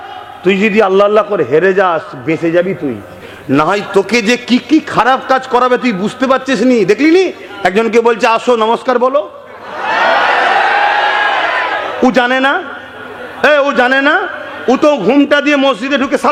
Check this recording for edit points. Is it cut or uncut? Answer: uncut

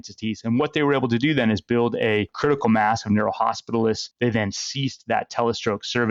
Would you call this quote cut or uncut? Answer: uncut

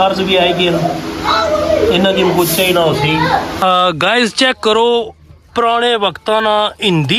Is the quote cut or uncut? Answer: cut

